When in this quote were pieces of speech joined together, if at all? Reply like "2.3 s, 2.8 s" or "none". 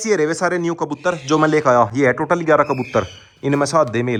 none

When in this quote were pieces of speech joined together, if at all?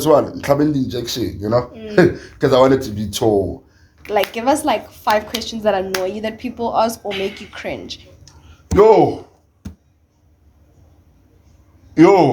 3.9 s

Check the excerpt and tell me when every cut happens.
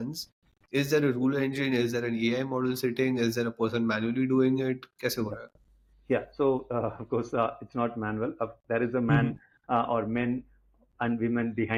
none

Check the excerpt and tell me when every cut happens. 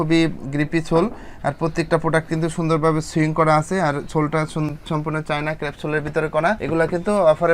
none

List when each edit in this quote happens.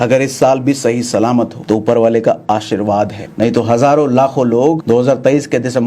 1.6 s, 3.2 s, 4.8 s

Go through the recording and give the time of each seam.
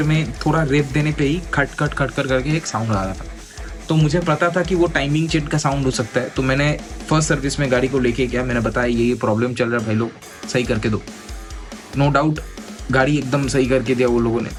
none

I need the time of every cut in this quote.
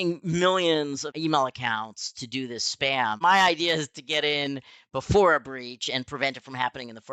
1.1 s, 3.2 s

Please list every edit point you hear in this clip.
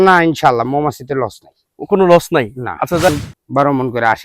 3.1 s

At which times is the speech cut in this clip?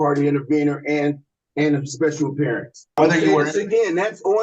3.0 s

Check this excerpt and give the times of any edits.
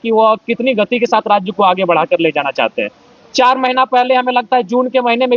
none

